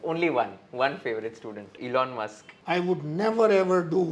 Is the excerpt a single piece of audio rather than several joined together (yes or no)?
no